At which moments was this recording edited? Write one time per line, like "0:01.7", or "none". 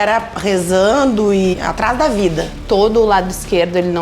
0:01.5
0:02.6